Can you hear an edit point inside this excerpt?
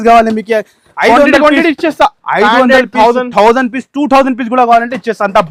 no; 0 cuts

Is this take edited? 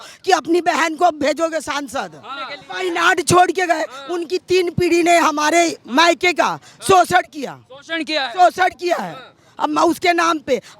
yes; 1 cut; at 2.6 s

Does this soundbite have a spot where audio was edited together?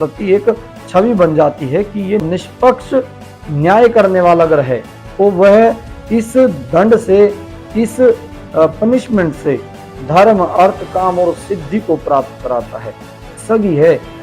yes; 2 cuts; at 2.2 s, 13.3 s

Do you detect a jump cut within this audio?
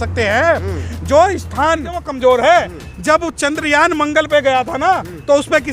yes; 1 cut; at 2.0 s

